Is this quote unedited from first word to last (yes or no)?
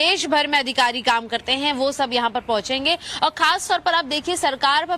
yes